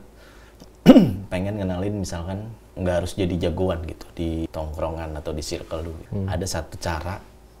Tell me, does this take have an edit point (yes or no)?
yes